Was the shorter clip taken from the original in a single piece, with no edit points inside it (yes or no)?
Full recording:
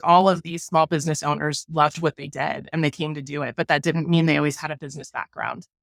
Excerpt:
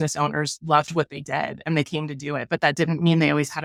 yes